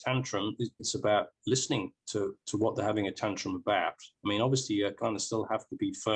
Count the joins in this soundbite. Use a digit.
1